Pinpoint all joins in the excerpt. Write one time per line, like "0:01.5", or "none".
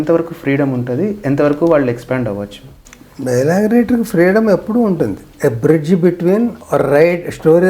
0:05.2
0:06.6